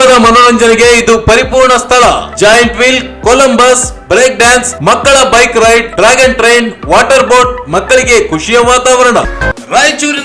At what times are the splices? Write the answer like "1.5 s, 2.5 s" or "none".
9.3 s